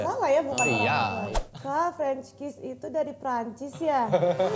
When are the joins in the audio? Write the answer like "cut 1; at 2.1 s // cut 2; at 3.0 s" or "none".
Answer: cut 1; at 1.3 s

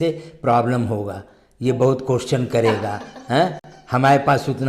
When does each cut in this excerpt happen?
none

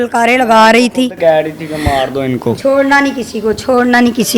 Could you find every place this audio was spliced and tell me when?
cut 1; at 2.6 s

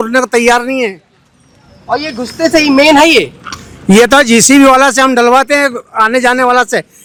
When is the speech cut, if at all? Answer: none

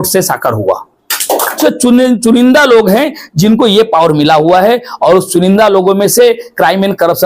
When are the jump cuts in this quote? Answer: cut 1; at 1.6 s

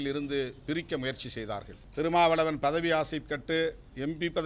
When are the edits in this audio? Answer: cut 1; at 1.8 s

